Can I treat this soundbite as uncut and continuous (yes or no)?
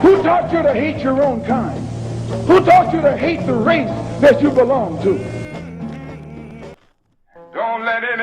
no